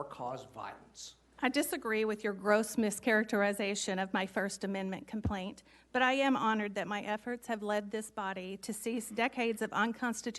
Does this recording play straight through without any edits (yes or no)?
no